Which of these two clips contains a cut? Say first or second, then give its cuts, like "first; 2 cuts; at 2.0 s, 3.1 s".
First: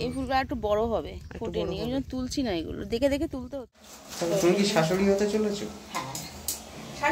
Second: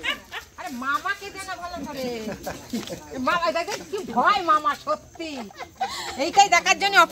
first; 1 cut; at 3.5 s